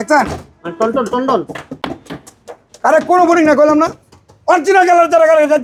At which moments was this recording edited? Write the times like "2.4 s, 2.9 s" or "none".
none